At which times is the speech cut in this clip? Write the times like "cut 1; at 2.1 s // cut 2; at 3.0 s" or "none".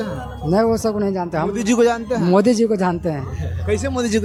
none